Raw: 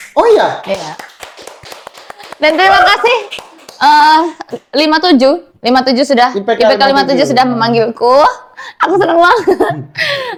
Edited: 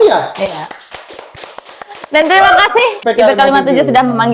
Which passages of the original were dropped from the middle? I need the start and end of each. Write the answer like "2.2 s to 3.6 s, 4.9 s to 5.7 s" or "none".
3.3 s to 6.4 s